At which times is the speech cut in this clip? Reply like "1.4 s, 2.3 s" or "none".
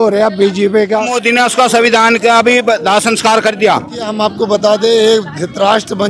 1.1 s, 4.1 s